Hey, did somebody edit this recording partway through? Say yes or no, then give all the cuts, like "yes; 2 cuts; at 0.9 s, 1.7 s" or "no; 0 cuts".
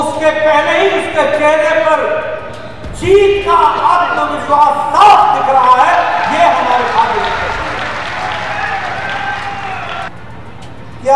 yes; 1 cut; at 10.1 s